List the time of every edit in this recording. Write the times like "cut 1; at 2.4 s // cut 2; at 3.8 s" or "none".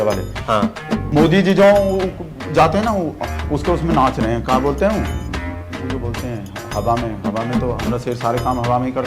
cut 1; at 1.0 s